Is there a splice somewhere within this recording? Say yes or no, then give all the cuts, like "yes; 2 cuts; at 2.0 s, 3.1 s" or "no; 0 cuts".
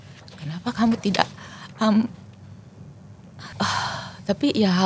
yes; 1 cut; at 3.5 s